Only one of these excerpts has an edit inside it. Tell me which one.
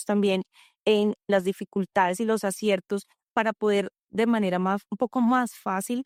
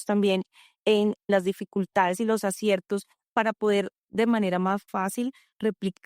second; 1 cut; at 4.9 s

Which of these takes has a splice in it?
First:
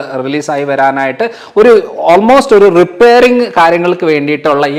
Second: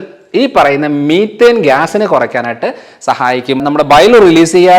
second; 1 cut; at 3.6 s

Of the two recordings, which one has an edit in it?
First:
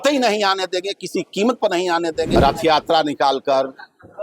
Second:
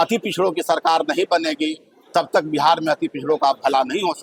first; 1 cut; at 2.3 s

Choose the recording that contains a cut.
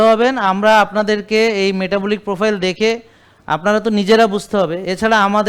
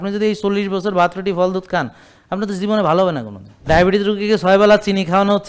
second; 1 cut; at 3.7 s

